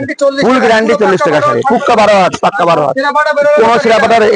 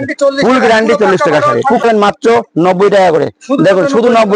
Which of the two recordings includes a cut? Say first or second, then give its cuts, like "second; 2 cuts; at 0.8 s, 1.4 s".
second; 1 cut; at 1.8 s